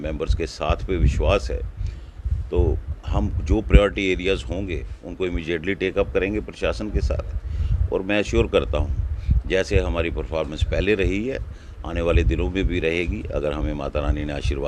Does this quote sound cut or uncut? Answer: uncut